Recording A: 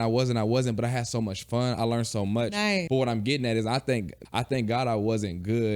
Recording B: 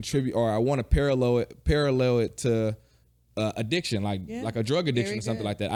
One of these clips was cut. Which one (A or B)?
A